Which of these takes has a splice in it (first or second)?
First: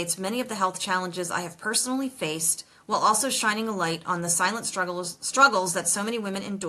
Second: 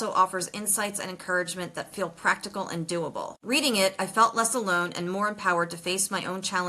second